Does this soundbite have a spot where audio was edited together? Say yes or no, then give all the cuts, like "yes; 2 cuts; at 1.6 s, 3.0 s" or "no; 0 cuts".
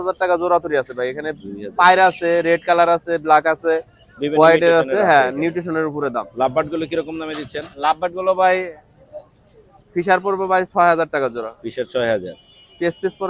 no; 0 cuts